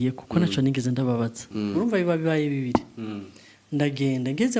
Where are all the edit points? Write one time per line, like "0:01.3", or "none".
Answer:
0:01.7